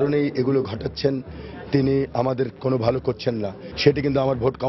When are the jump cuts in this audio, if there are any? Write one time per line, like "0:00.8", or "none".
0:03.6